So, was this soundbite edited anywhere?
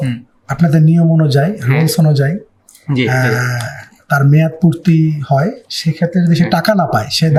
no; 0 cuts

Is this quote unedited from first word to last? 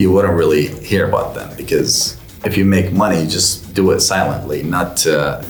yes; 0 cuts

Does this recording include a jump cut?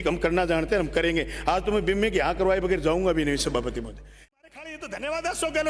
yes; 1 cut; at 4.3 s

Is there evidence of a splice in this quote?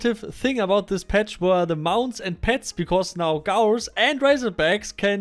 no; 0 cuts

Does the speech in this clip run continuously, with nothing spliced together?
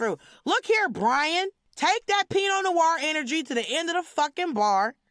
no; 1 cut; at 1.6 s

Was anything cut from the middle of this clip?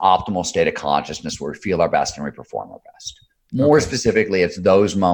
no; 0 cuts

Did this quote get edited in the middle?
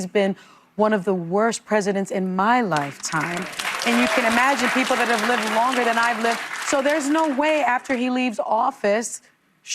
no; 0 cuts

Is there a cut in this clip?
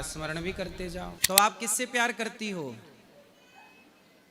yes; 1 cut; at 1.1 s

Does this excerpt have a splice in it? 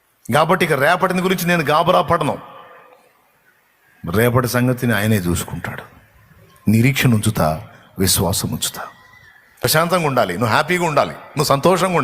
yes; 1 cut; at 9.6 s

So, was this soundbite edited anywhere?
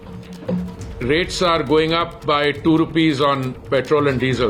no; 0 cuts

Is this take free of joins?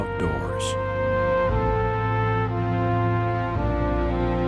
yes; 0 cuts

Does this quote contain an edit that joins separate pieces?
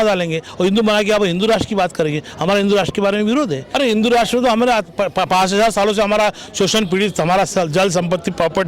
yes; 1 cut; at 3.6 s

